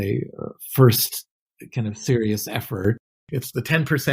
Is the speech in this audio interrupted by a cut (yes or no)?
yes